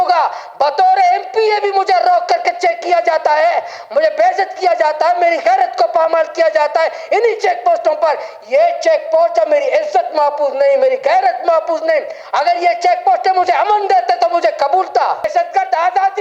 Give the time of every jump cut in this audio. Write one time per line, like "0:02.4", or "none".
0:15.3

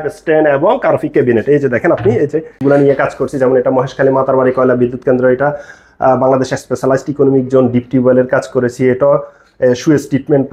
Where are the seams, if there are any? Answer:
0:02.5

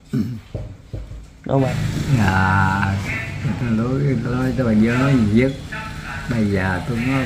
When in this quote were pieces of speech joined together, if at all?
0:01.7

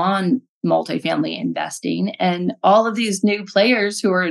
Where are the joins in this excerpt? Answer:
none

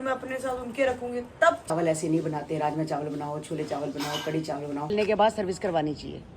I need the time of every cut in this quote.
0:01.7
0:04.9

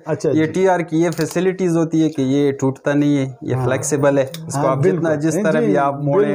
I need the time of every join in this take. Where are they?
none

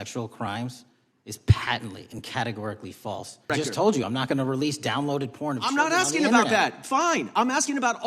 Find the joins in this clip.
0:03.5

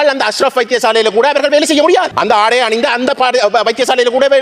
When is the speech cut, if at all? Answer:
0:02.1

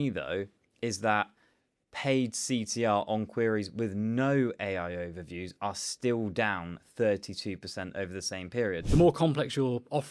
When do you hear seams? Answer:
0:08.8

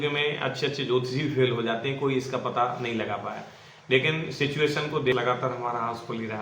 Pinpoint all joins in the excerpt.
0:05.1

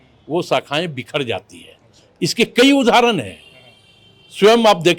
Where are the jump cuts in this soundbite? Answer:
none

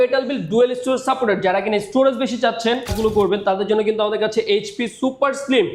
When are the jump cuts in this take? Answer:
0:02.9

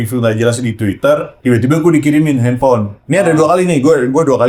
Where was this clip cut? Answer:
none

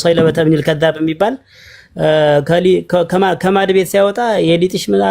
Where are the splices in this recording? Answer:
none

